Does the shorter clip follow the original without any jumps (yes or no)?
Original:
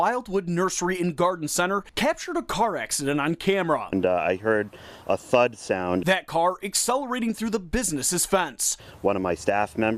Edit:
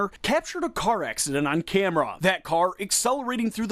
no